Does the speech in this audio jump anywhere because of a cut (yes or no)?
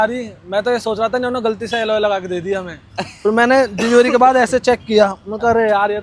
no